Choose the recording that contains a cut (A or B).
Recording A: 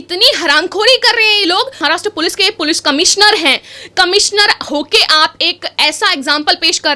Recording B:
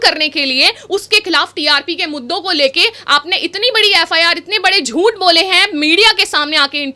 A